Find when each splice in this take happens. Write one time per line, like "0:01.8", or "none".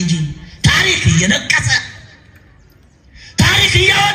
none

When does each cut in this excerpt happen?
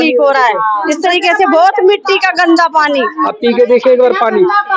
0:03.2

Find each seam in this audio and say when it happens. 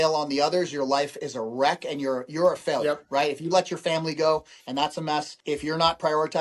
0:05.3

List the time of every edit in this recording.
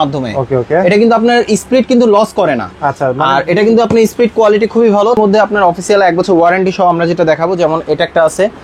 0:05.2

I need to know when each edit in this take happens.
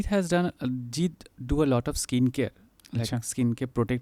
none

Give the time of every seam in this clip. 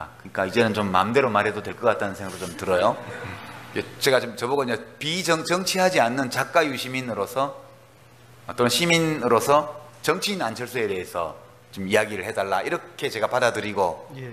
none

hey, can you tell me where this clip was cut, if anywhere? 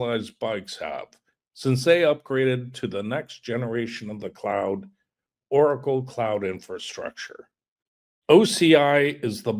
none

